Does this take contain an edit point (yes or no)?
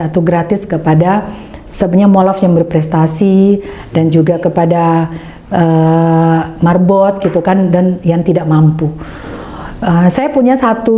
no